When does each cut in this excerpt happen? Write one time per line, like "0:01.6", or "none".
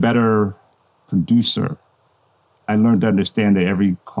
none

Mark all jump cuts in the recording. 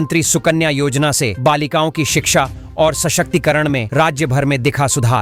none

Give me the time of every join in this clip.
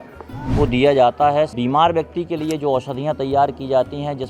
0:01.5

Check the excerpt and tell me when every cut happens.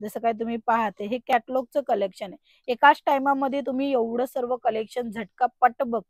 none

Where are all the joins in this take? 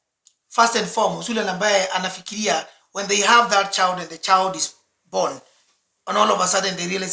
none

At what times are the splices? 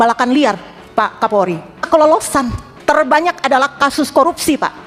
0:01.8
0:02.6

